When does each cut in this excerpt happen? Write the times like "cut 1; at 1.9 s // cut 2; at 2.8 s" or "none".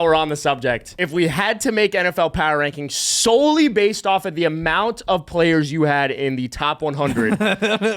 cut 1; at 0.9 s